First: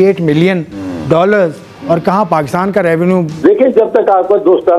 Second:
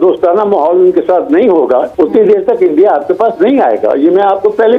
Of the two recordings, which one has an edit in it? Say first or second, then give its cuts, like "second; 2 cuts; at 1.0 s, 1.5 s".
first; 1 cut; at 3.3 s